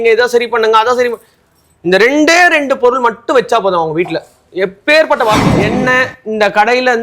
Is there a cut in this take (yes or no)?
yes